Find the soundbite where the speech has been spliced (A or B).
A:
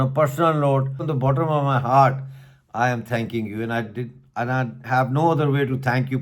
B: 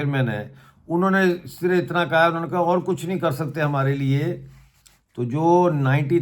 A